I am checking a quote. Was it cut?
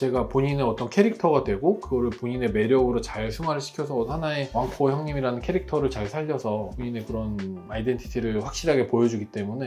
no; 0 cuts

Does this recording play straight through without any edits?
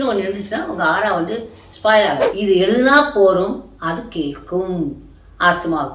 no; 1 cut; at 2.2 s

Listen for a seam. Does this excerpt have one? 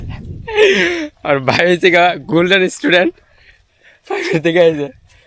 no; 0 cuts

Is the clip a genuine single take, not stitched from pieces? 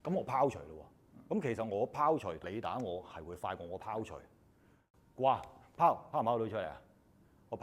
no; 2 cuts; at 2.4 s, 4.8 s

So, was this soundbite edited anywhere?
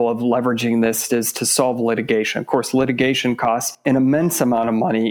yes; 1 cut; at 3.8 s

